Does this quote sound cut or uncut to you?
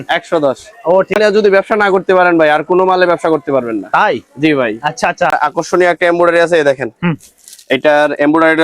cut